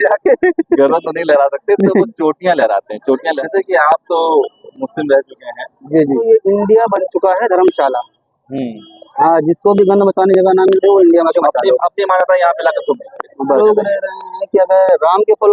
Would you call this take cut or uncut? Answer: cut